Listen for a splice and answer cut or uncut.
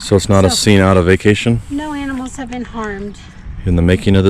cut